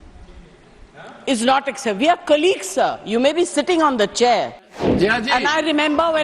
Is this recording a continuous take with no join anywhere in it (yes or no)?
no